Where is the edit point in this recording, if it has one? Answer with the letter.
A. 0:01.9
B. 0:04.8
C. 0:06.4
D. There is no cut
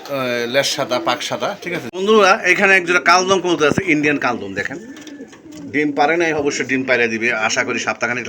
A